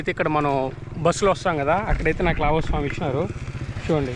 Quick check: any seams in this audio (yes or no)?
no